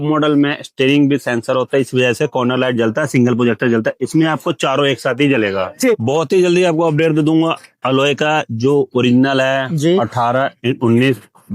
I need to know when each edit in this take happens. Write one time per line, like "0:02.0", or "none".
0:06.0